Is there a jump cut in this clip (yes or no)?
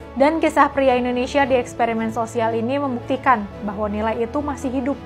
no